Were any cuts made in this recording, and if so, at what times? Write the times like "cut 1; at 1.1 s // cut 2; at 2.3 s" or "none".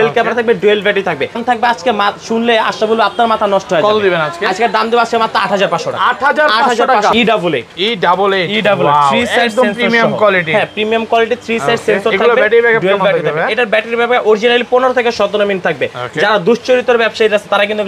cut 1; at 1.4 s // cut 2; at 7.1 s